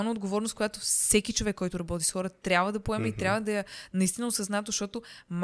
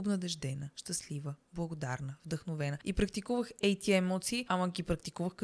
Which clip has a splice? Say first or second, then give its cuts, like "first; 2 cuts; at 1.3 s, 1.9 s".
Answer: second; 2 cuts; at 2.8 s, 4.4 s